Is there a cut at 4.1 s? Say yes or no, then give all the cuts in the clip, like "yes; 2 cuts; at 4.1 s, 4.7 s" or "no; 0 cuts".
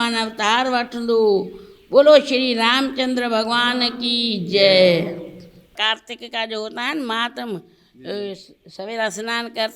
no; 1 cut; at 5.8 s